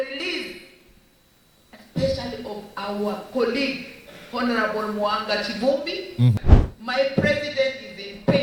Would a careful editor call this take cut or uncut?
cut